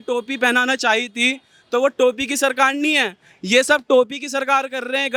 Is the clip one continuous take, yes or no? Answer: yes